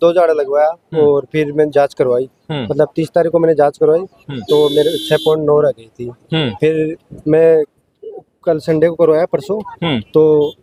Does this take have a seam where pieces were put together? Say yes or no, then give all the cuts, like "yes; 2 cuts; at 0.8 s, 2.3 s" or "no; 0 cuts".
no; 0 cuts